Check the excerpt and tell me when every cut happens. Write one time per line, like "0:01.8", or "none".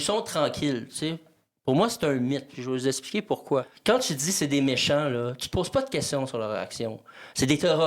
0:03.7